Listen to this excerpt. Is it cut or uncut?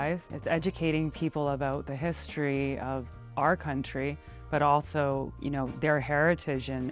cut